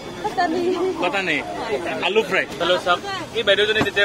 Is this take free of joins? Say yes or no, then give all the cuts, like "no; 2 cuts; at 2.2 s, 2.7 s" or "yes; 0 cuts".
no; 1 cut; at 2.6 s